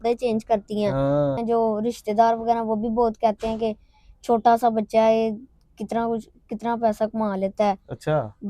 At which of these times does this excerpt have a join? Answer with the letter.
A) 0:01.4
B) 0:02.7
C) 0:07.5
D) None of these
A